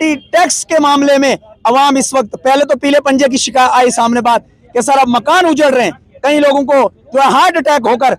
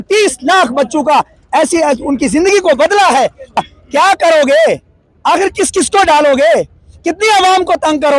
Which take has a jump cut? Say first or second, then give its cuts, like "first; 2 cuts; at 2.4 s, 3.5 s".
second; 1 cut; at 3.6 s